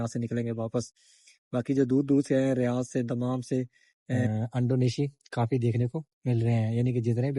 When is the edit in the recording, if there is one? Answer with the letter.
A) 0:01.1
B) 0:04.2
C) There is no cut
B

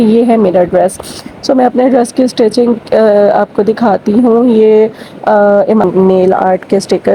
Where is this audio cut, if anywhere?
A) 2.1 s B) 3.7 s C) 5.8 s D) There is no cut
C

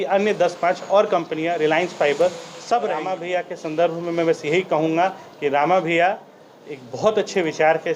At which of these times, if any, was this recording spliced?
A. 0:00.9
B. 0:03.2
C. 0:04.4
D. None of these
B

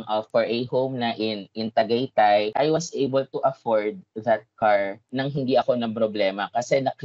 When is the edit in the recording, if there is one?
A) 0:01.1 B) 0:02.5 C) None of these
B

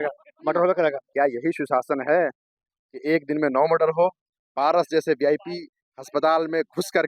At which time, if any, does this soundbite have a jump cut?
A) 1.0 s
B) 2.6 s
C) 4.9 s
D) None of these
A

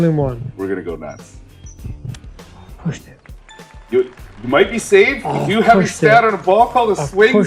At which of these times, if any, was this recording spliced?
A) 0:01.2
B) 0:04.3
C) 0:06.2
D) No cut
A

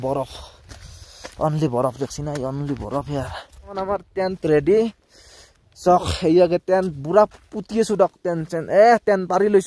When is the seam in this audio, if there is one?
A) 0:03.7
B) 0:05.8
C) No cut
A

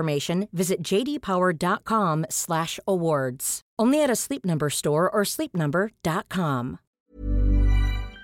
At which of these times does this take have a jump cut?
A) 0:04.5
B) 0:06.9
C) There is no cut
B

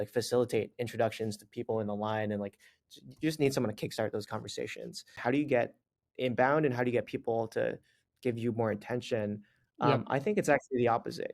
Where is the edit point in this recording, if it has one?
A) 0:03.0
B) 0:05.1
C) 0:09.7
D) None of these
B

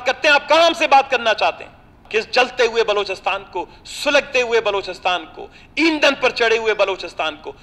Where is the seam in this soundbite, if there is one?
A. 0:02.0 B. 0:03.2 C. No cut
A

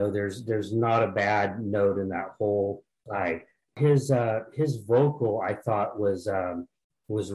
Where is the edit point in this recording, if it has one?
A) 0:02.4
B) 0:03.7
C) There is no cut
B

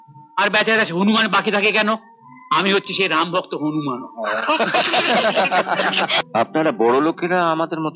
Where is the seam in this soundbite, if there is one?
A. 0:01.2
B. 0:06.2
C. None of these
B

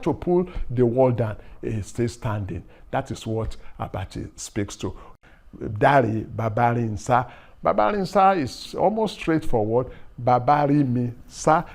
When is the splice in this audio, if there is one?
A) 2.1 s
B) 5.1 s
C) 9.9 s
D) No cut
B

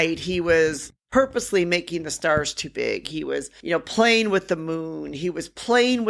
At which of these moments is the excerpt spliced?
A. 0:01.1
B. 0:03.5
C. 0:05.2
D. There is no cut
B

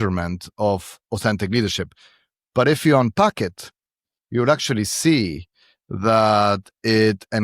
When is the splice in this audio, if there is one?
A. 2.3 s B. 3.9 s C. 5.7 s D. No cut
D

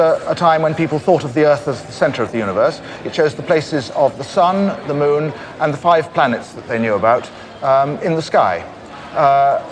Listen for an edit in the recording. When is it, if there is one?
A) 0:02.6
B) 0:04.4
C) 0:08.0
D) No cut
B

